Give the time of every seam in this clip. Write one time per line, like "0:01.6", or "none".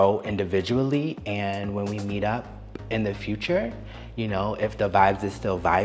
none